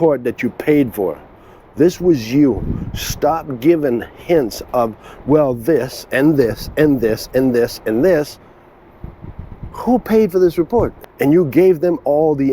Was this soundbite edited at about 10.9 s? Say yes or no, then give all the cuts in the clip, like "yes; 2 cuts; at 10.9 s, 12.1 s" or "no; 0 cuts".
yes; 1 cut; at 10.9 s